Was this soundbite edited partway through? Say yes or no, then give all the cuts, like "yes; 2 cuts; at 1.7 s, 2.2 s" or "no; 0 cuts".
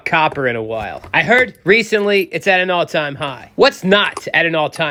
no; 0 cuts